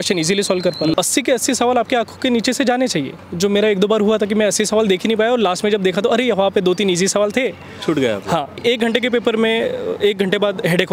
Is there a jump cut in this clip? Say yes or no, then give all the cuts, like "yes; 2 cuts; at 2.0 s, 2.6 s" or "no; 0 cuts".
yes; 2 cuts; at 0.9 s, 8.6 s